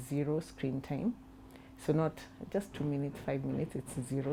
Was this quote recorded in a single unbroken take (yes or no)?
yes